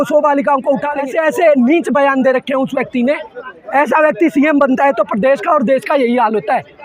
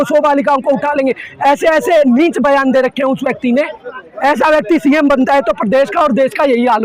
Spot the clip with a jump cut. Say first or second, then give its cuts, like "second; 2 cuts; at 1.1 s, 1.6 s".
first; 1 cut; at 1.1 s